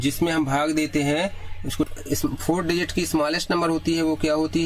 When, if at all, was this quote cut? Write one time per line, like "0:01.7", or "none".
0:01.9